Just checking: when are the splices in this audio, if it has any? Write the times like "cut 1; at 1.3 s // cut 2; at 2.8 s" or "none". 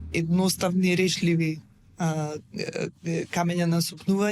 none